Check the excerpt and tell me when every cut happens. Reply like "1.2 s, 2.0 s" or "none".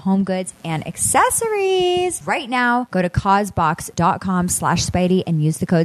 2.9 s, 3.9 s

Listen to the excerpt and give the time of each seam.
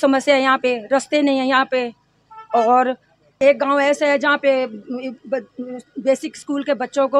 3.3 s

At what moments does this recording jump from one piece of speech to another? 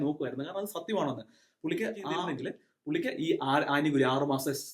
2.3 s

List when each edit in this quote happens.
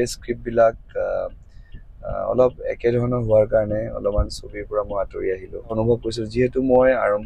5.7 s

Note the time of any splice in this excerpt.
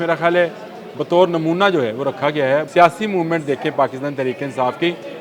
2.7 s

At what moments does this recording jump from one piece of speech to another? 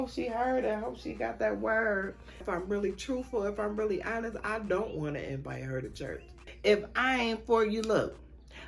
2.4 s, 6.4 s

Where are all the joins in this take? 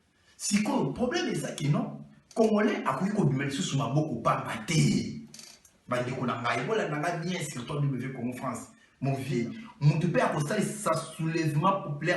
9.2 s

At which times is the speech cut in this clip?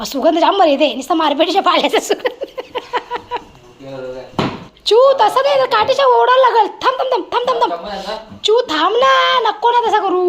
4.7 s

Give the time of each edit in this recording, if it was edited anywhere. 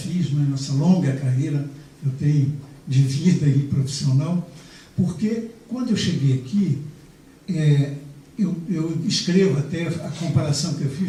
none

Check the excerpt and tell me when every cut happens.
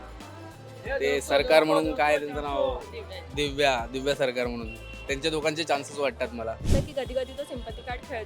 6.7 s

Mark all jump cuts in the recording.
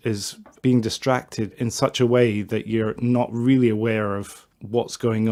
none

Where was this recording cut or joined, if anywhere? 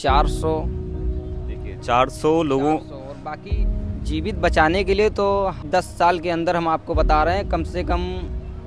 5.6 s

